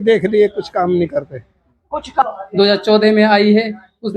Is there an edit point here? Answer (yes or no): yes